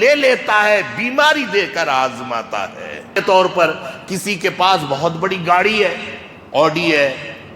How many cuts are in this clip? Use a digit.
1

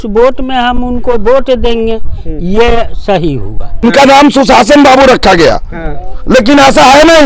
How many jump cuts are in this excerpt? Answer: 1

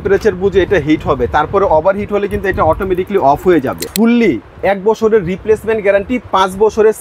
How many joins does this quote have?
1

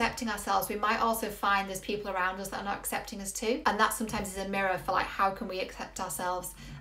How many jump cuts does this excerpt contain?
1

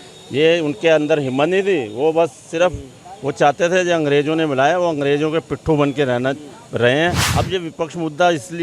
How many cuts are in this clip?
1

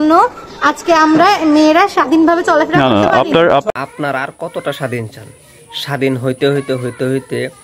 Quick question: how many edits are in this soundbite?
0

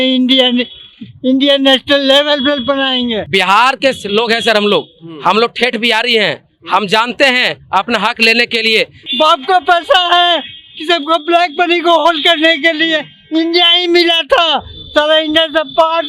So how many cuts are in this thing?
2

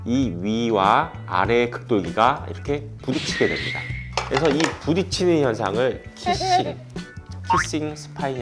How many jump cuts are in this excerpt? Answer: 1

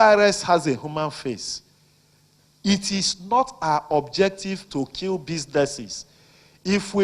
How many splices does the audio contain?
1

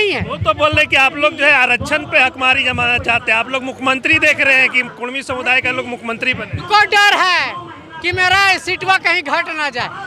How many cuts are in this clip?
1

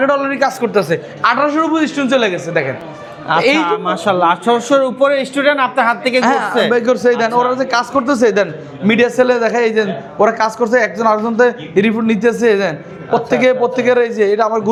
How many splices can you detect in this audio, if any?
0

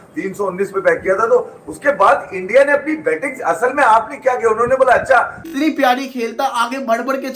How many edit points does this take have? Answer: 1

